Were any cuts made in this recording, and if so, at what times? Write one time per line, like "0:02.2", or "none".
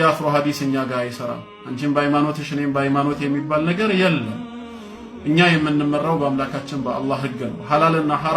none